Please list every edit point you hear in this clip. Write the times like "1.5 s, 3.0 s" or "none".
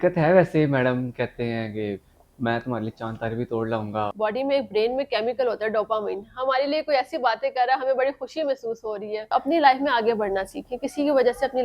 4.1 s, 9.2 s